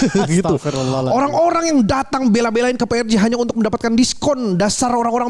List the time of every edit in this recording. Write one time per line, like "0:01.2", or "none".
none